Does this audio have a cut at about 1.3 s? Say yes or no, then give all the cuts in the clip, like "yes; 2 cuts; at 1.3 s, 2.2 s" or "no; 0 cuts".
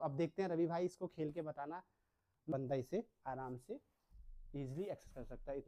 no; 1 cut; at 2.5 s